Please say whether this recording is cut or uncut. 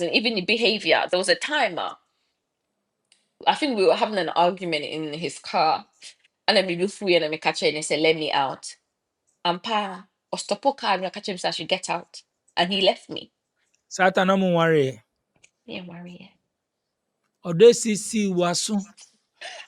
uncut